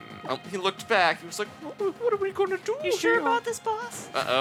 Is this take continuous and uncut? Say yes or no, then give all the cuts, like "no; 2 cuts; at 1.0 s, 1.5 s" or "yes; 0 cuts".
yes; 0 cuts